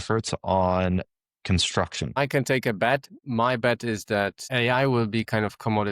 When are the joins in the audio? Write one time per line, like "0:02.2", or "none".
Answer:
0:02.2
0:03.2
0:04.4